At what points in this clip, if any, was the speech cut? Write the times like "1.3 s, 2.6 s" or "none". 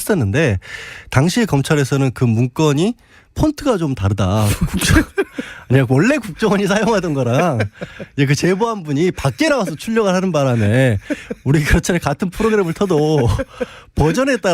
2.5 s